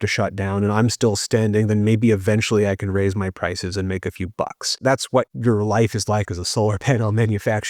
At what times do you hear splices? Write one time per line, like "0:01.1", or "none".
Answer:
0:05.2